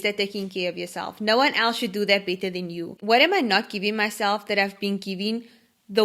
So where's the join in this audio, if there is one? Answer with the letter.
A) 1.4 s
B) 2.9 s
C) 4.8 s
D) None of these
B